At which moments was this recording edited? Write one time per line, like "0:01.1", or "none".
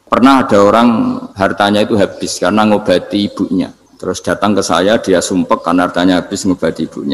0:01.3
0:03.9